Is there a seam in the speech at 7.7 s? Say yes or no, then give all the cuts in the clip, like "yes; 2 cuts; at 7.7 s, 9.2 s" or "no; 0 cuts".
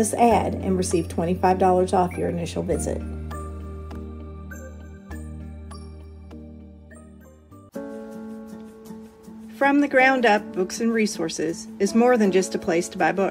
yes; 1 cut; at 7.7 s